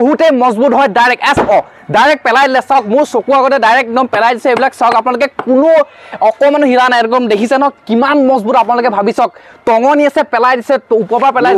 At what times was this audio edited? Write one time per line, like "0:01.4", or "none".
none